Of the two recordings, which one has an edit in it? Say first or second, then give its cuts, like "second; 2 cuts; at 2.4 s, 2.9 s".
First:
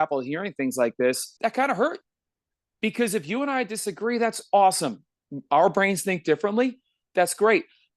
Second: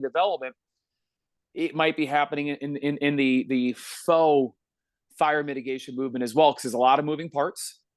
first; 1 cut; at 1.3 s